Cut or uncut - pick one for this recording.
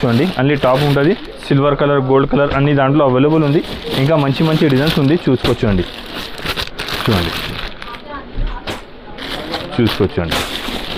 uncut